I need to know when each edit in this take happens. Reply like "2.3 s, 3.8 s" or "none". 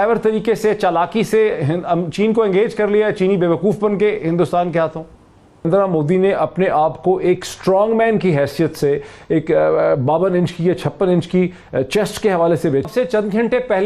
5.7 s, 12.8 s